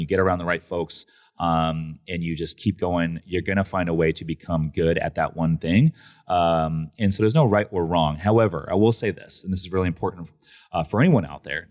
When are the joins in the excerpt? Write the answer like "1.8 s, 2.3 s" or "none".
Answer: none